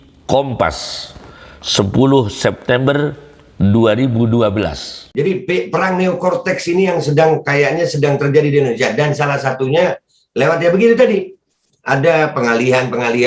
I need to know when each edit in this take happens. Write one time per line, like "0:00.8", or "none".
0:05.1